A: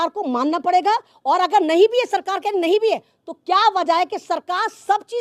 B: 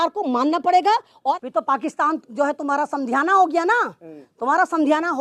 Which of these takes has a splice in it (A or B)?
B